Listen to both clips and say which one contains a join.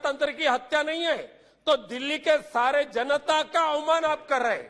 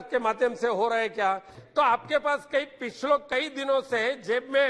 second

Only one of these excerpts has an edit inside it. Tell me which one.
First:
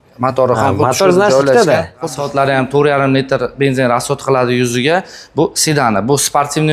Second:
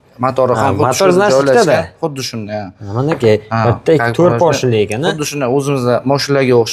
first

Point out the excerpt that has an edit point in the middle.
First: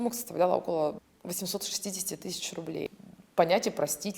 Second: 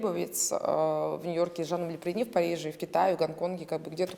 first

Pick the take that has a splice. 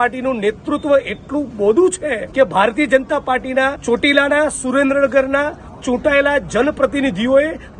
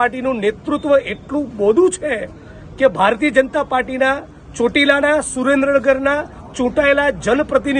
first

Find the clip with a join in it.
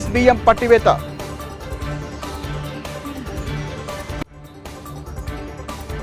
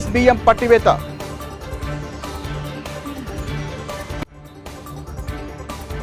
second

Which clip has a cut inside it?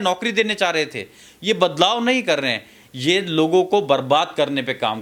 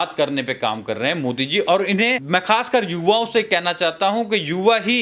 second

